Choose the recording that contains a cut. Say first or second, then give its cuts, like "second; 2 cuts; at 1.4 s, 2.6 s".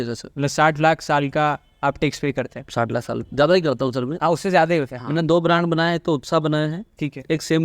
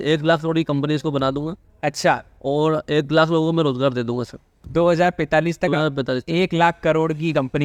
first; 1 cut; at 5.0 s